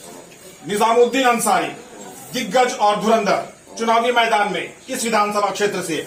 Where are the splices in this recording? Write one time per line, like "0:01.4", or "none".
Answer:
none